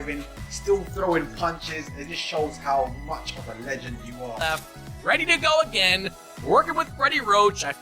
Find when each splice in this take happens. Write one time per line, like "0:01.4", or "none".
0:04.7